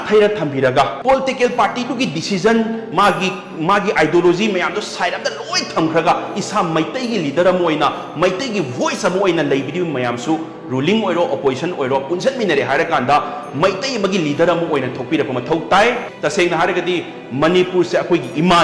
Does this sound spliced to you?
yes; 1 cut; at 16.1 s

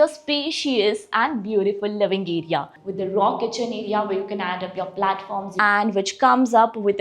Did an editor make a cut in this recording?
yes; 2 cuts; at 2.8 s, 5.6 s

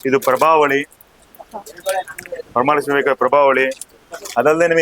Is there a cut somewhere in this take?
no; 0 cuts

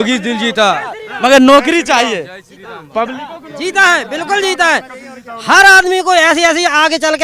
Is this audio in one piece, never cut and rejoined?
yes; 0 cuts

